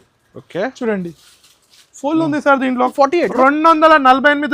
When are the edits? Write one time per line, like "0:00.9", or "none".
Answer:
0:02.9